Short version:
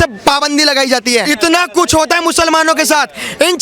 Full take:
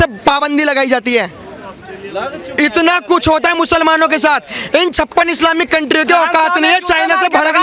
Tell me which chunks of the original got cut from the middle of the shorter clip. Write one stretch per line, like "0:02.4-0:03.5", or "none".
0:01.2-0:02.6